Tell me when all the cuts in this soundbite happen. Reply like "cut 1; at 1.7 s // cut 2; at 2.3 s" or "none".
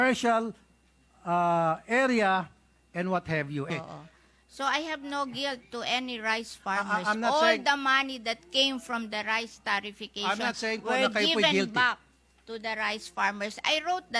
cut 1; at 3.7 s